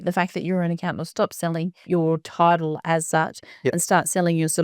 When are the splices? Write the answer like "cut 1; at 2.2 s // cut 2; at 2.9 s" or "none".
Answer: cut 1; at 1.8 s